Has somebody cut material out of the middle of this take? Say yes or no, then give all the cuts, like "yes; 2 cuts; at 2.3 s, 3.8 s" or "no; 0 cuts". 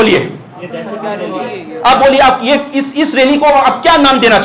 no; 0 cuts